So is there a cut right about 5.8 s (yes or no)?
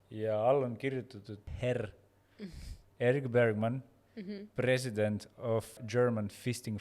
yes